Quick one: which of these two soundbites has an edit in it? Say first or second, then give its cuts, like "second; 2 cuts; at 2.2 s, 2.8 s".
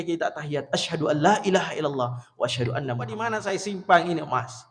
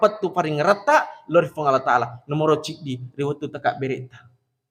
first; 1 cut; at 3.3 s